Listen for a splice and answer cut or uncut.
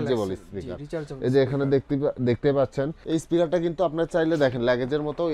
cut